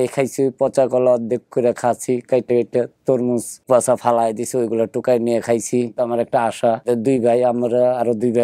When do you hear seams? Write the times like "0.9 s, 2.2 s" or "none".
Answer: 3.6 s, 6.0 s, 6.9 s